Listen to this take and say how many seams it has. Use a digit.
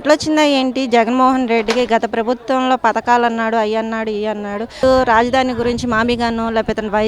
1